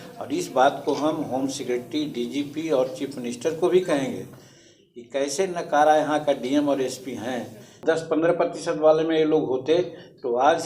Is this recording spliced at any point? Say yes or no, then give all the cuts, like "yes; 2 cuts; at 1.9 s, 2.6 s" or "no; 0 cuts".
yes; 1 cut; at 7.8 s